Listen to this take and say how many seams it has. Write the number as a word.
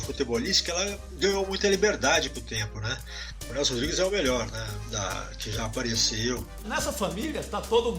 two